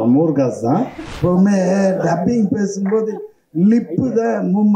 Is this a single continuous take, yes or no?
no